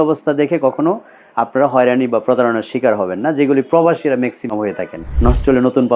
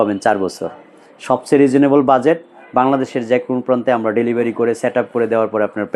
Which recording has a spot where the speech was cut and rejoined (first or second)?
first